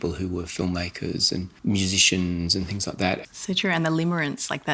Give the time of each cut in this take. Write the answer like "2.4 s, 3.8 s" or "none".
1.5 s, 3.2 s